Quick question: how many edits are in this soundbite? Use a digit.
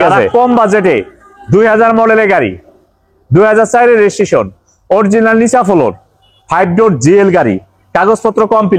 0